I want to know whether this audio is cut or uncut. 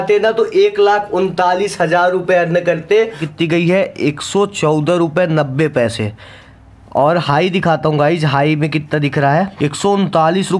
cut